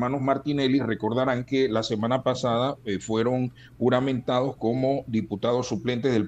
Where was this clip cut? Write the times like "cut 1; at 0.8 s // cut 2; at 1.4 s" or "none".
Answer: none